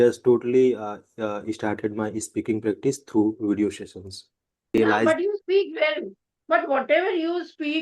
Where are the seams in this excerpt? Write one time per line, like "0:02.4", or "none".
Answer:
0:04.8